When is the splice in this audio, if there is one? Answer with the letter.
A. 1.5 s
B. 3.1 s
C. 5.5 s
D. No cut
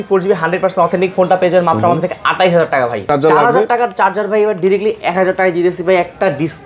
B